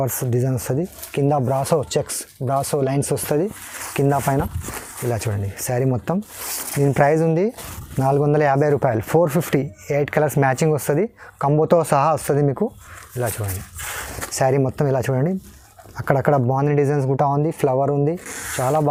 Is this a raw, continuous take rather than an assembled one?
yes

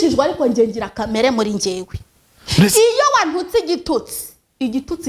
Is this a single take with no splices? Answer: yes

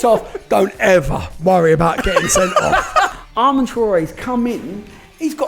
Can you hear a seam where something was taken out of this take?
yes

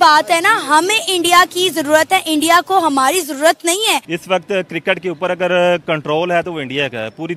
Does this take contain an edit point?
yes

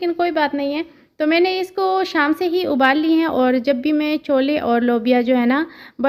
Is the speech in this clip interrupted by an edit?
no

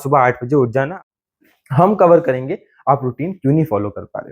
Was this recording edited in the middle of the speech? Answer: yes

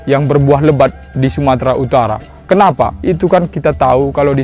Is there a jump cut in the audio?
no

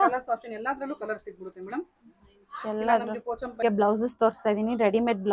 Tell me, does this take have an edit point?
yes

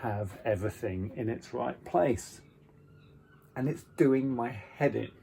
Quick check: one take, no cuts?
yes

